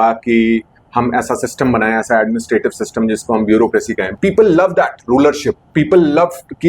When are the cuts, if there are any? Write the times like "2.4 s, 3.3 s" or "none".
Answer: 4.1 s